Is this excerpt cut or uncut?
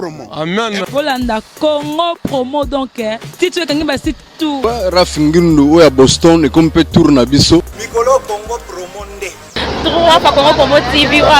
cut